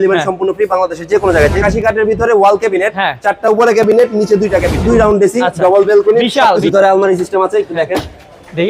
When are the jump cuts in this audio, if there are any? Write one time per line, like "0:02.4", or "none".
0:01.6
0:04.8
0:06.6